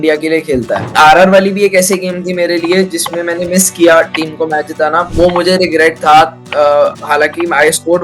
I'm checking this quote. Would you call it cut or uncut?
cut